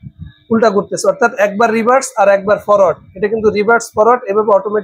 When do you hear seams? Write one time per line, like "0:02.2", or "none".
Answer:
none